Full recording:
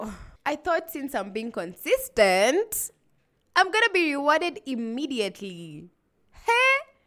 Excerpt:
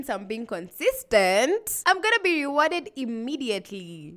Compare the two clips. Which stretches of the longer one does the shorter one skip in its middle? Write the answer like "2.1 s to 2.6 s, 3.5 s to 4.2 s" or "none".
2.8 s to 3.4 s